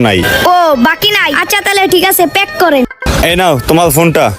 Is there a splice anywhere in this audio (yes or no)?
yes